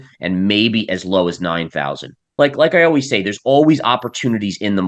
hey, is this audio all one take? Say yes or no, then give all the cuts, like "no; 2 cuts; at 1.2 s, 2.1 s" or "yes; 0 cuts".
no; 1 cut; at 2.2 s